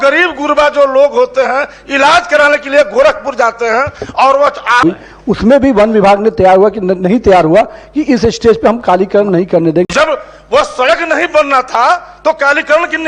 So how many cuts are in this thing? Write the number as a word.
two